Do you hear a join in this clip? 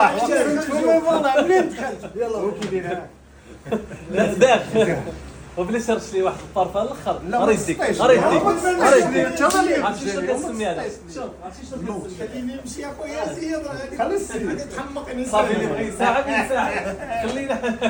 no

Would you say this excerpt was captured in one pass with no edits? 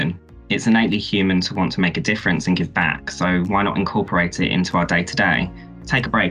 yes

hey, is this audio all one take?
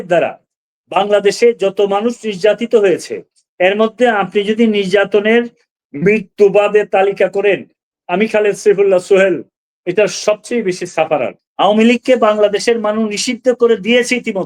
no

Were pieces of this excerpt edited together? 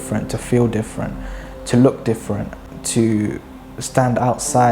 yes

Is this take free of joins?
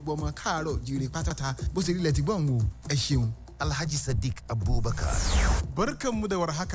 no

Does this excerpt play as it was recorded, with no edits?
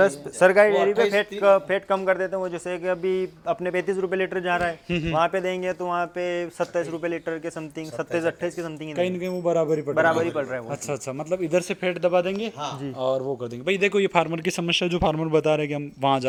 yes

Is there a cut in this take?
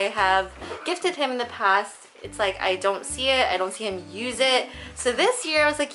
no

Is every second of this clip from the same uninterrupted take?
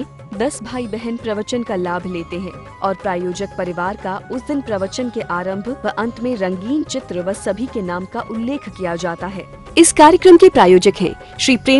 no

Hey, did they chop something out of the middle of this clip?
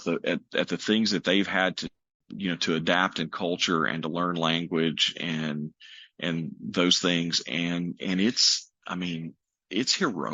no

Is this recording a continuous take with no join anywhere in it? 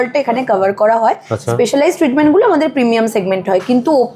yes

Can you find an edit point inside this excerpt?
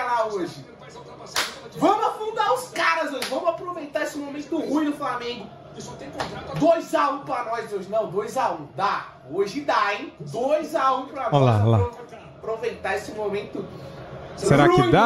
no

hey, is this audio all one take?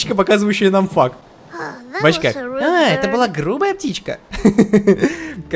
yes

